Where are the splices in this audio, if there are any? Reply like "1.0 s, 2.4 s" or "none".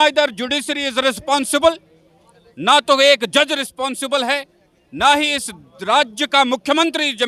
none